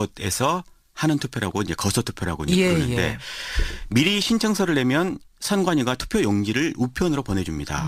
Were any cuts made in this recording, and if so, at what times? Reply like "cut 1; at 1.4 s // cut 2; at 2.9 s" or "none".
none